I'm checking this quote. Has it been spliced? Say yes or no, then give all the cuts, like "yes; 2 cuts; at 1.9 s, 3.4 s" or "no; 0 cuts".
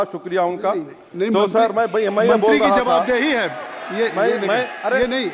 no; 0 cuts